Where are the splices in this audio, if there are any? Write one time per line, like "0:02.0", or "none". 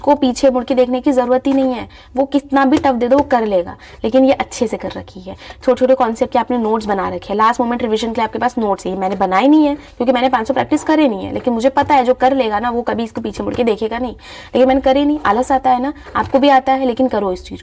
none

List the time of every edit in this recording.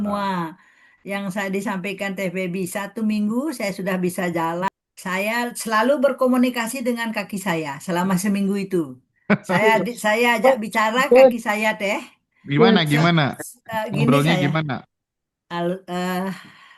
0:04.7

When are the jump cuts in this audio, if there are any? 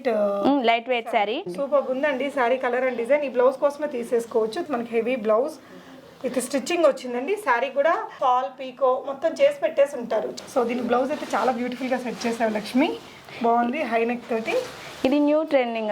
0:01.5
0:04.6
0:08.1
0:10.3

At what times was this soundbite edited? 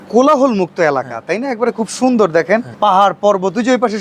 0:02.7

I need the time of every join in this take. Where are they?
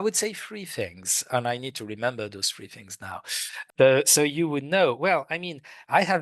0:01.3
0:03.6

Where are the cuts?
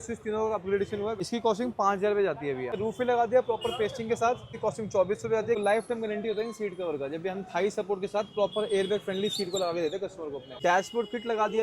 0:01.2
0:02.8
0:04.5
0:05.6
0:10.5

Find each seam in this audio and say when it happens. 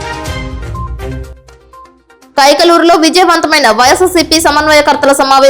0:01.2

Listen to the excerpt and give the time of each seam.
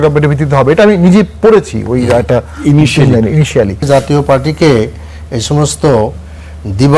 0:03.8

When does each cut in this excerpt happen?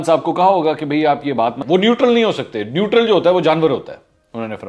0:01.5

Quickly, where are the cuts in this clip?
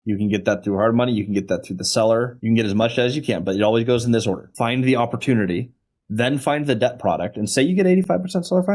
0:02.3
0:04.5

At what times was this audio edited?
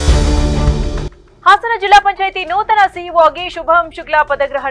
0:01.2

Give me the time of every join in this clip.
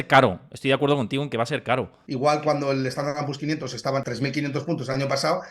0:02.0
0:04.1

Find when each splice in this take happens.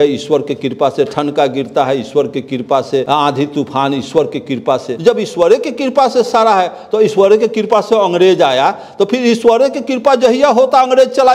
0:03.1
0:04.9

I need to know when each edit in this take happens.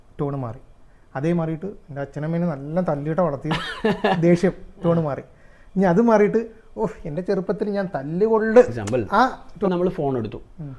0:09.7

